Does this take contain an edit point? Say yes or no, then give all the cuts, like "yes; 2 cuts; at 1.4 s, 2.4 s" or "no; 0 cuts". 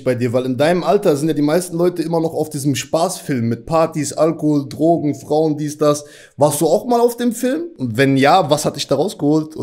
no; 0 cuts